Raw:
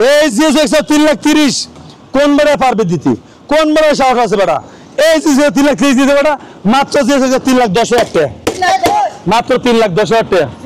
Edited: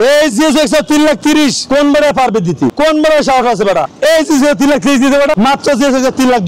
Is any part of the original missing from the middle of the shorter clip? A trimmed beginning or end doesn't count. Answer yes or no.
yes